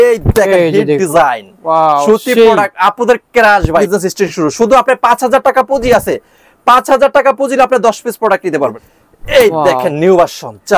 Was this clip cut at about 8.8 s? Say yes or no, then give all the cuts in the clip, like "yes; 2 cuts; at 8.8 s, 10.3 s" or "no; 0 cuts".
yes; 2 cuts; at 3.9 s, 8.8 s